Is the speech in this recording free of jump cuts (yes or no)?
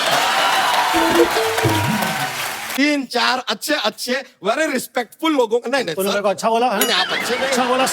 no